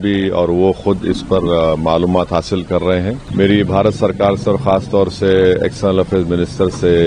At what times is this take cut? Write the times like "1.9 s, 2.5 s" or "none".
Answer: 3.2 s